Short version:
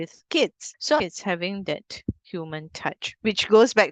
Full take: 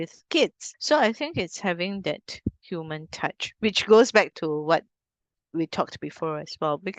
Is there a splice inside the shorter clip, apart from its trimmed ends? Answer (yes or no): yes